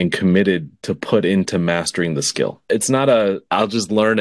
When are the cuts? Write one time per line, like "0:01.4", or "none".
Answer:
0:02.6
0:03.4